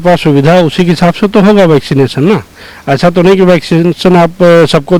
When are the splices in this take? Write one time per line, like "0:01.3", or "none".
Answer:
none